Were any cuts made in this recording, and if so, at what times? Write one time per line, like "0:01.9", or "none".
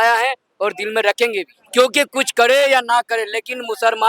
none